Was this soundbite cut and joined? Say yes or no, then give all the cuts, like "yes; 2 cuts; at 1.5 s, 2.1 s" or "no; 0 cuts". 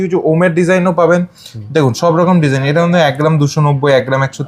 no; 0 cuts